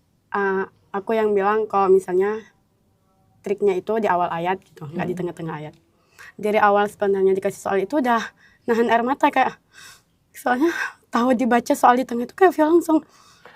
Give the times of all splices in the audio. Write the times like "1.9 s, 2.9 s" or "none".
none